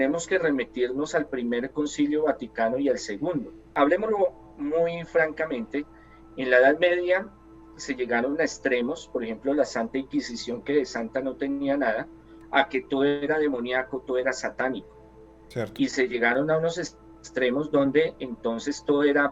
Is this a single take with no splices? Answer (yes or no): no